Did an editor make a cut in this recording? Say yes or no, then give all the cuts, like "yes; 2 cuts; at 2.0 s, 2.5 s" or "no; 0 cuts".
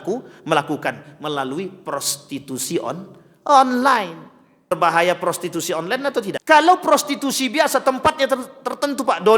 yes; 2 cuts; at 4.7 s, 6.4 s